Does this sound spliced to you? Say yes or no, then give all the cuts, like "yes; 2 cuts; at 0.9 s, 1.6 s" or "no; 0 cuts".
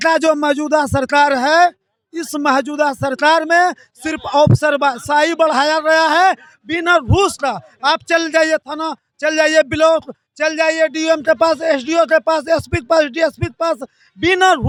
no; 0 cuts